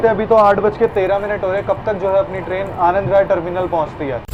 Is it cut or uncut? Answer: uncut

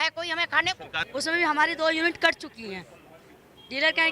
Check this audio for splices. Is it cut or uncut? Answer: cut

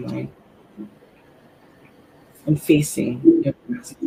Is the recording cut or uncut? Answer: uncut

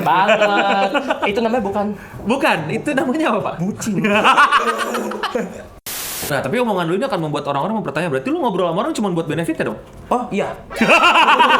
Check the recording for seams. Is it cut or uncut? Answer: cut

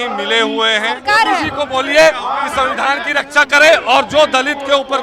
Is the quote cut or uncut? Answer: cut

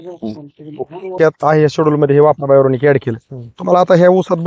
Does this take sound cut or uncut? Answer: cut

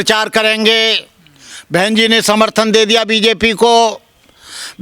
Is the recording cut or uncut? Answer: uncut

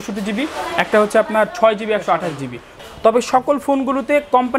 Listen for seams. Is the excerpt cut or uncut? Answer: cut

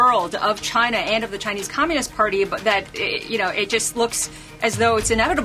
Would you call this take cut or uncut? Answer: uncut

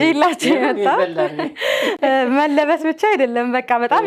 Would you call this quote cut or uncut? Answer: uncut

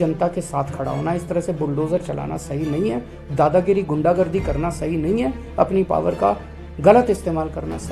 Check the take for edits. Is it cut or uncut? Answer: uncut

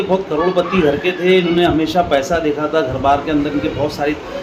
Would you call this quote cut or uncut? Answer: uncut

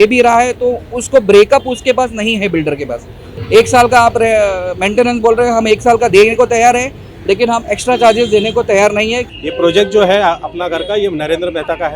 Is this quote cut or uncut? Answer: cut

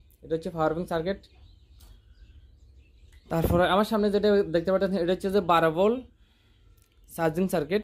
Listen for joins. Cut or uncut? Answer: uncut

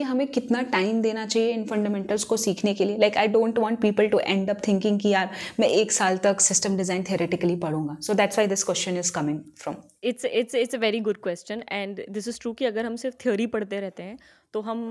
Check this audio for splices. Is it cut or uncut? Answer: uncut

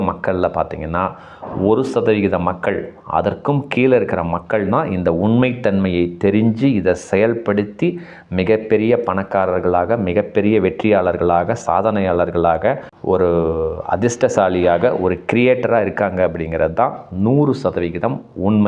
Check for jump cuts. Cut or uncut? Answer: uncut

